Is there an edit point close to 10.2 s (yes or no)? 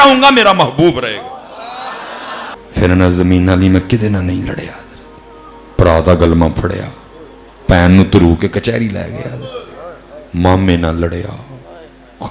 no